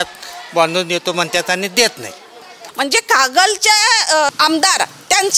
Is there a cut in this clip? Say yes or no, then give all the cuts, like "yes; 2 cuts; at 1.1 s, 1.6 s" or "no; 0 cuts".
yes; 2 cuts; at 2.6 s, 4.3 s